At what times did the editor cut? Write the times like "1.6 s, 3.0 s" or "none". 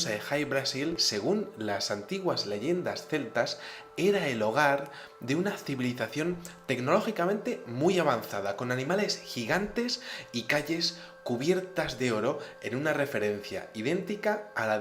12.6 s